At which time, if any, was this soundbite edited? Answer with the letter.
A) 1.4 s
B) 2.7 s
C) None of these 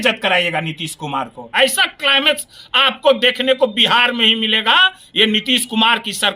A